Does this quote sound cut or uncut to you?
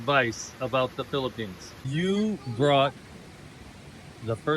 cut